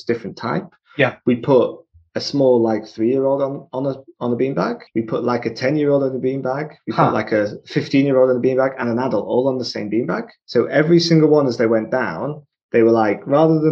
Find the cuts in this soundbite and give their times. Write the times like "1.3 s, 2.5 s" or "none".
4.9 s, 10.3 s